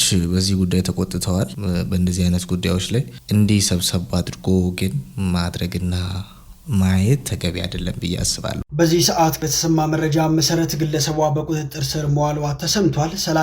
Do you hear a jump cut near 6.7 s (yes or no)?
no